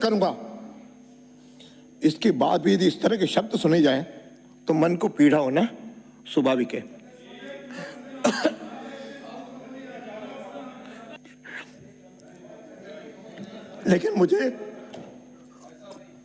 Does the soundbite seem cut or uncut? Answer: cut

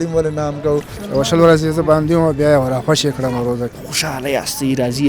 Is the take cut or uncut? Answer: cut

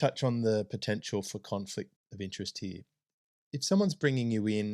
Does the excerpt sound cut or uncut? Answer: cut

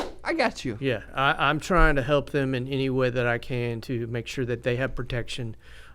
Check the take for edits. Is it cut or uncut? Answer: cut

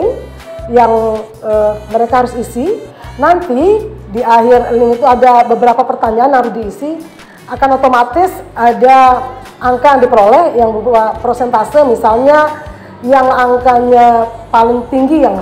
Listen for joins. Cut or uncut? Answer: uncut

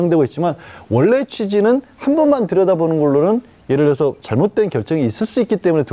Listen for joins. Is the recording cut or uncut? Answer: uncut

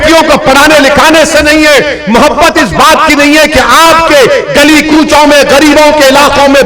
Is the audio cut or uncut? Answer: uncut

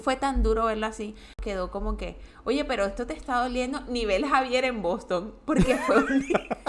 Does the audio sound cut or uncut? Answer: cut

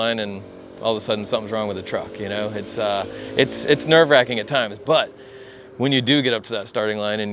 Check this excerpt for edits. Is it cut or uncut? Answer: uncut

